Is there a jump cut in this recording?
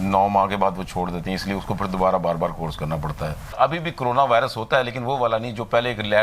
yes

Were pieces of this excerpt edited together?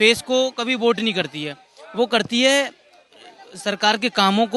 no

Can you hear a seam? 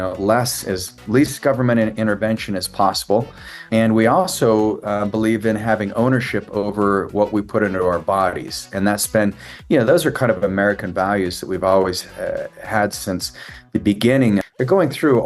yes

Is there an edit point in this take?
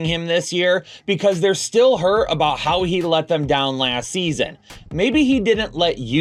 no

